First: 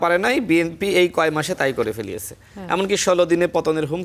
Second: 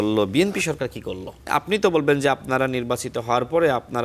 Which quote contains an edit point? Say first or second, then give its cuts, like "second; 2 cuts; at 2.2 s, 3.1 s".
second; 1 cut; at 1.5 s